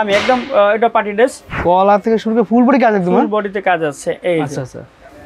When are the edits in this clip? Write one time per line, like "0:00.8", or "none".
0:01.4